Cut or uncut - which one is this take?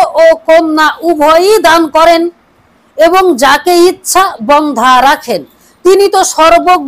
uncut